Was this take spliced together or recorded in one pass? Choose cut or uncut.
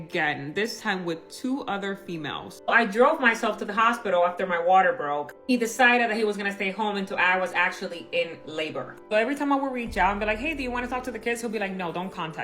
cut